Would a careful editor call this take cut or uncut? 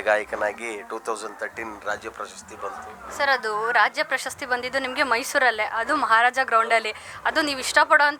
uncut